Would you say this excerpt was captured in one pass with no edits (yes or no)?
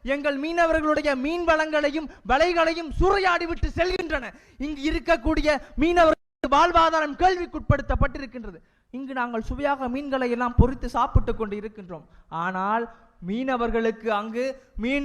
yes